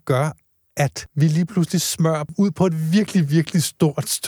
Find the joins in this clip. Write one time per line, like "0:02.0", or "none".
0:01.0
0:02.3